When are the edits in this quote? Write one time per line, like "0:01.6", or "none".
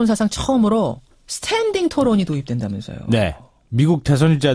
0:03.2